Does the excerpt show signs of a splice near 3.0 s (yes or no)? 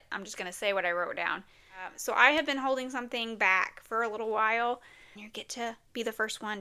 no